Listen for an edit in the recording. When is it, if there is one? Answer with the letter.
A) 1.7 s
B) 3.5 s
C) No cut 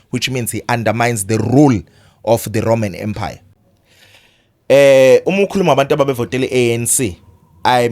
B